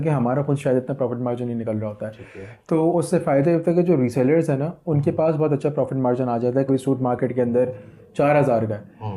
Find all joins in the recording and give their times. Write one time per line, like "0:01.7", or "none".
0:06.7